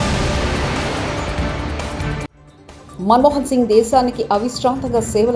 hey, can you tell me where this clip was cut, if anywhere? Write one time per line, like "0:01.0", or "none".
0:02.4